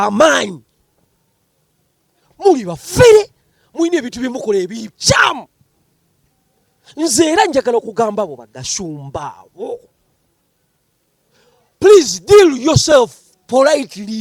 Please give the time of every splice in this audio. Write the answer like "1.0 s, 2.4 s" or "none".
none